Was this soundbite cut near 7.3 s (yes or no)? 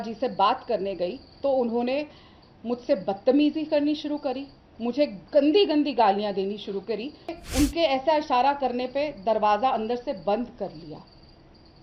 yes